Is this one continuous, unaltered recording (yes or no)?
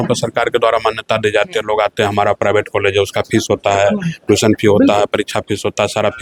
yes